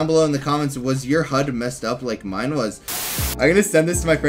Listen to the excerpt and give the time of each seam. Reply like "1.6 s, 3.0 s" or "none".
3.0 s